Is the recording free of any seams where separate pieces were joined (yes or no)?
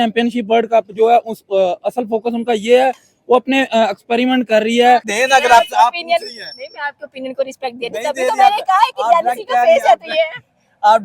no